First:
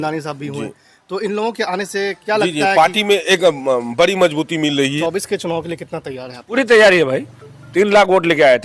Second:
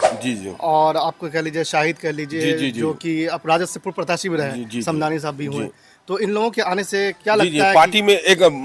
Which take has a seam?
first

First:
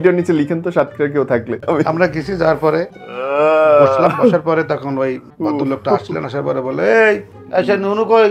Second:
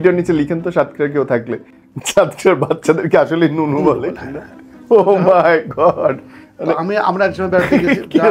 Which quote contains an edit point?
first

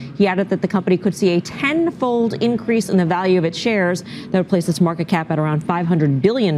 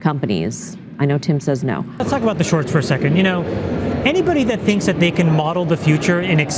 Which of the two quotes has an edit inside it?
second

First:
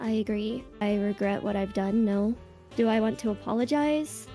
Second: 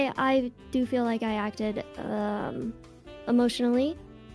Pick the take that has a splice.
first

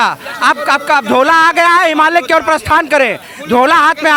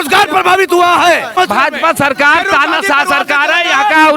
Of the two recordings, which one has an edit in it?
second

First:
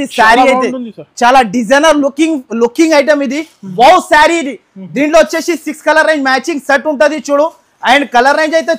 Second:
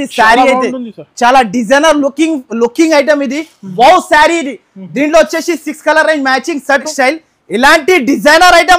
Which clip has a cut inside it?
second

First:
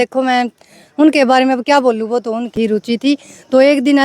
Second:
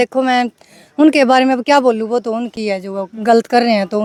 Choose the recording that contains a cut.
first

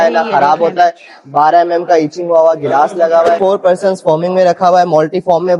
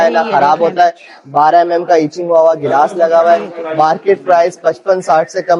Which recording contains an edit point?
first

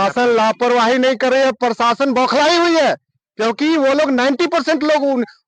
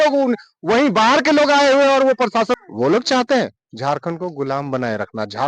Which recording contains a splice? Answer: second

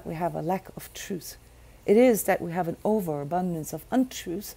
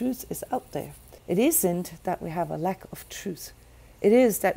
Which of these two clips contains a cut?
second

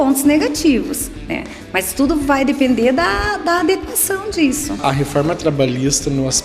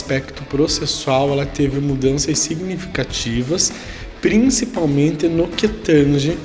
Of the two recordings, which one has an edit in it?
first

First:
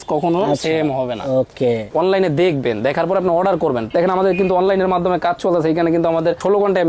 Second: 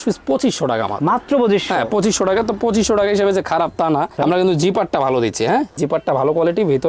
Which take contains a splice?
first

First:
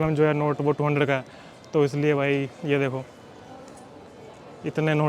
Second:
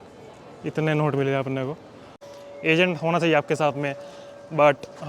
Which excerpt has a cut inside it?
second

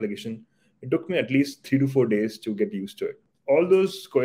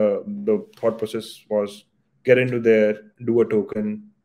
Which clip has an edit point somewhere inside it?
first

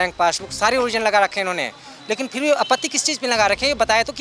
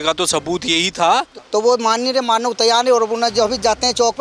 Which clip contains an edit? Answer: second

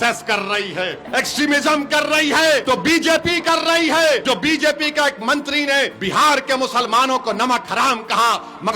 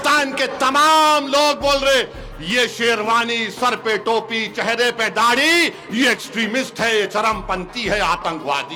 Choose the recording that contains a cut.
first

